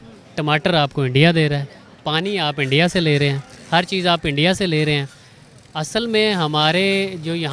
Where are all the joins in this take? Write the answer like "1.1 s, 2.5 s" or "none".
none